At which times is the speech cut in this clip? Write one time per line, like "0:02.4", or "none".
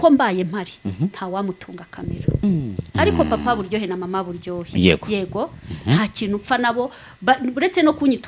0:02.8